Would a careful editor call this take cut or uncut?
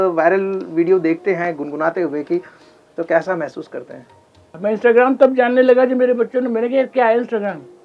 cut